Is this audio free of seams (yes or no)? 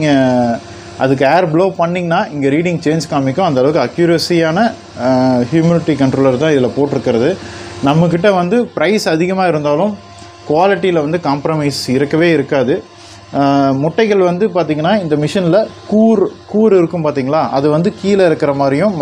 yes